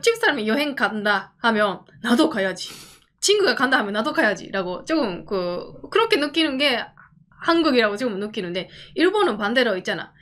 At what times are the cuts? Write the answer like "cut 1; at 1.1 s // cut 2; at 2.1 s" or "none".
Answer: none